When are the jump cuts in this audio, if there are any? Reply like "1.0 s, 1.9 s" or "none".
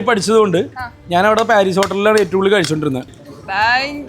3.2 s